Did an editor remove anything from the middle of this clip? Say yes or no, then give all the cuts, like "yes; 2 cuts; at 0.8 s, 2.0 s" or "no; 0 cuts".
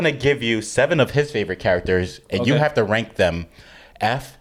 no; 0 cuts